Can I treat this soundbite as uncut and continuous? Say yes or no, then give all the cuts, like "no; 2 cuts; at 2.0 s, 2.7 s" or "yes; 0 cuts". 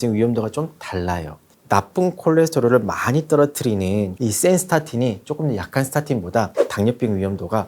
yes; 0 cuts